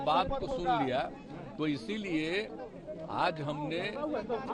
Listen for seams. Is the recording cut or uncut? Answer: uncut